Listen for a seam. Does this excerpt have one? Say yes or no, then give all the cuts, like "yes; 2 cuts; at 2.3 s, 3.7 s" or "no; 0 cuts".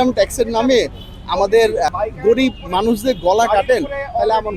yes; 1 cut; at 1.9 s